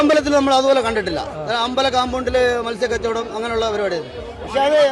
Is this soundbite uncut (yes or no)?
yes